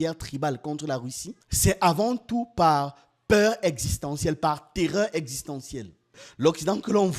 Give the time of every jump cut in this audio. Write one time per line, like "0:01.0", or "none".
0:06.1